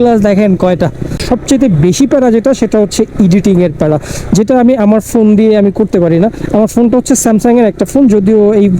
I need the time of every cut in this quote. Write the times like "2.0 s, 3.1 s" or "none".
1.2 s